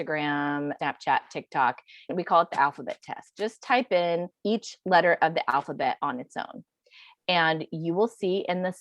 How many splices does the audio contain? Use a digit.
3